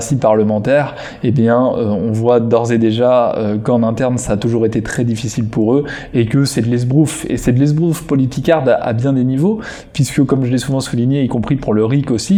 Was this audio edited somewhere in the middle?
no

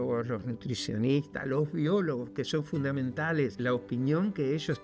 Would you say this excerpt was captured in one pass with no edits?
no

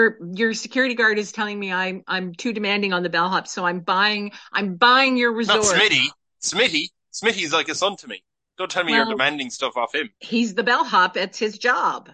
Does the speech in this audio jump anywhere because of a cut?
no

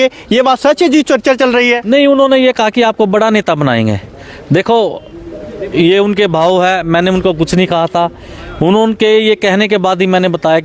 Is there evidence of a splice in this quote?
no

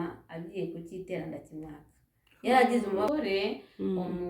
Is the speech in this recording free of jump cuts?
no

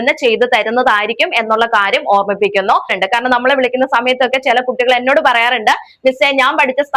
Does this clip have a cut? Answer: yes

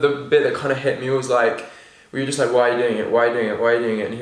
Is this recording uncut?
yes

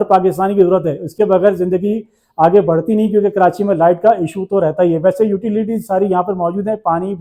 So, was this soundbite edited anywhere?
no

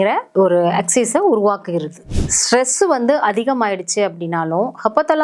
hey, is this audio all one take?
no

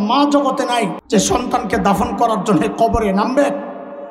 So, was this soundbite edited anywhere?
yes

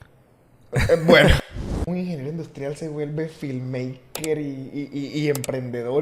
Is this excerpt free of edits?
no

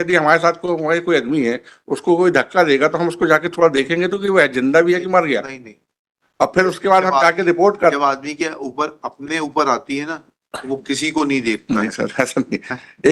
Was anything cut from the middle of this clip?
no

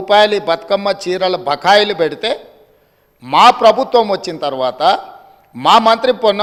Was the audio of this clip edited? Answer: no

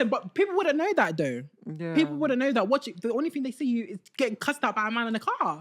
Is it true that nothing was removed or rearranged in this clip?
yes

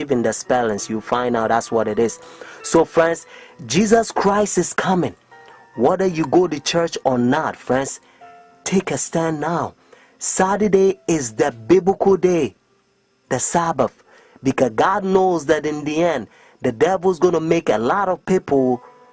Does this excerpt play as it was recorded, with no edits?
yes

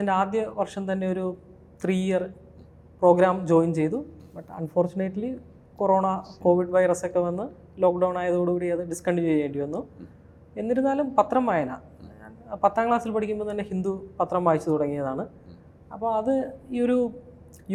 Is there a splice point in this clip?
no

